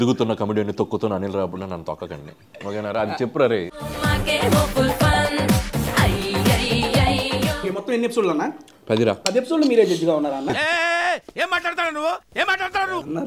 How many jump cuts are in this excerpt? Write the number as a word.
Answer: three